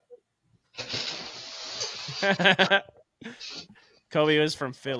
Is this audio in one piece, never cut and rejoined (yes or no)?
yes